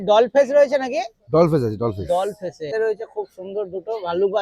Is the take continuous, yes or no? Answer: no